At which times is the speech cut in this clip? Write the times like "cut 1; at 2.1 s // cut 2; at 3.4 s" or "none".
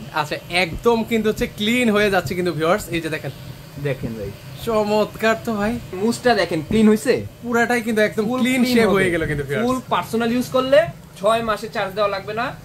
cut 1; at 5.9 s // cut 2; at 9.8 s